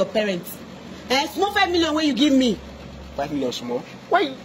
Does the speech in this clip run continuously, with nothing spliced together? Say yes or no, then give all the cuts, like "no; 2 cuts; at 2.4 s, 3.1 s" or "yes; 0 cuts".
yes; 0 cuts